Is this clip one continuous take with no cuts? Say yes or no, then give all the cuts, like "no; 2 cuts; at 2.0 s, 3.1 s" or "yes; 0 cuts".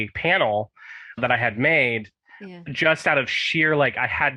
yes; 0 cuts